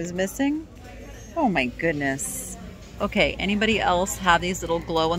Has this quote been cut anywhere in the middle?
yes; 1 cut; at 2.9 s

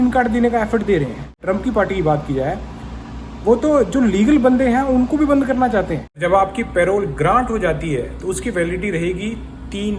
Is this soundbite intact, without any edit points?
no; 2 cuts; at 1.4 s, 6.0 s

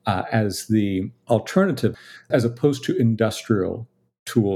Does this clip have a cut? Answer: yes; 2 cuts; at 1.1 s, 2.2 s

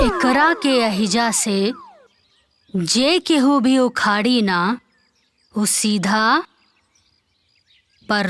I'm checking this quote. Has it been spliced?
no; 0 cuts

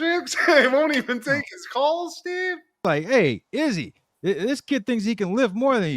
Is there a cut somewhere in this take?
yes; 1 cut; at 2.8 s

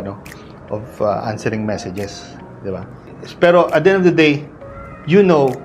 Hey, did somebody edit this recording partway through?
yes; 1 cut; at 3.2 s

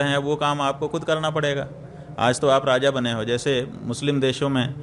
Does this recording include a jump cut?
no; 0 cuts

